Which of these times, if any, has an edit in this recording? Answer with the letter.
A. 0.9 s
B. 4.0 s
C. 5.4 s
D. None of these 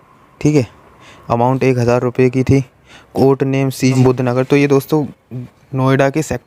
B